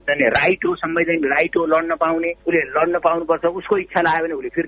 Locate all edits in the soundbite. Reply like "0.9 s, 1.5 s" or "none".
2.4 s